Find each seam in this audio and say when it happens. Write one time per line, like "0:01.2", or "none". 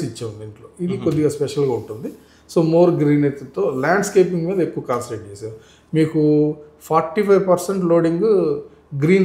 none